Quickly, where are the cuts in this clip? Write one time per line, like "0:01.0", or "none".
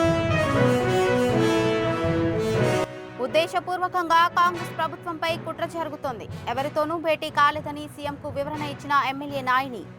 0:02.9